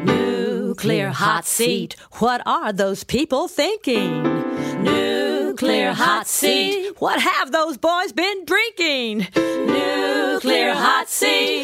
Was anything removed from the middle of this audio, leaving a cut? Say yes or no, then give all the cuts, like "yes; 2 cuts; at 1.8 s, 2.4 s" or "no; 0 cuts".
no; 0 cuts